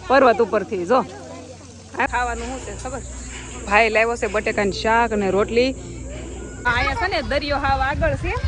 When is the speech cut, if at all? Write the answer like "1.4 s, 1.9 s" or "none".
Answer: 2.1 s, 6.7 s